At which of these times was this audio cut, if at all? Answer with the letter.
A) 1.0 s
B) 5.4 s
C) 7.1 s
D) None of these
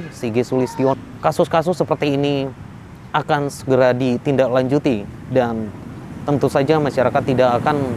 A